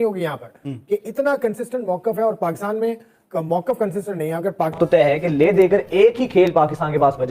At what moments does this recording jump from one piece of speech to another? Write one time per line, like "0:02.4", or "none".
0:04.7